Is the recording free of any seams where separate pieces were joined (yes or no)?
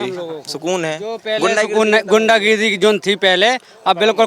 yes